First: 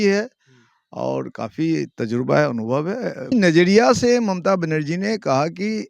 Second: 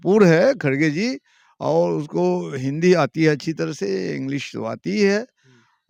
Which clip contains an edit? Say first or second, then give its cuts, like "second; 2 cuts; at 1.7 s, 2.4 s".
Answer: first; 1 cut; at 3.3 s